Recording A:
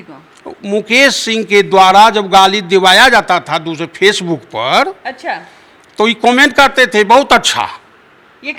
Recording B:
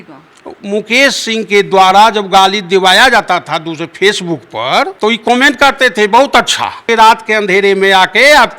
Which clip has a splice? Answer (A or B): B